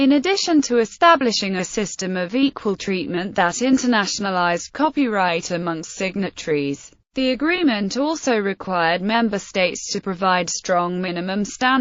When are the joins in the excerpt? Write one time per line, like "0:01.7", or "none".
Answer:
0:04.7